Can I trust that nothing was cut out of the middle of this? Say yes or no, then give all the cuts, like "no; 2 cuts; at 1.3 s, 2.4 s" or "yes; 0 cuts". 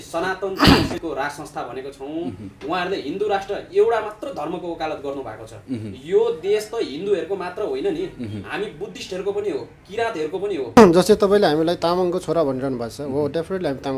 no; 2 cuts; at 0.9 s, 10.8 s